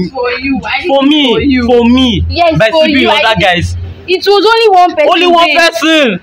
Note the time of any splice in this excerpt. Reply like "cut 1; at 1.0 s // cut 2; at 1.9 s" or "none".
none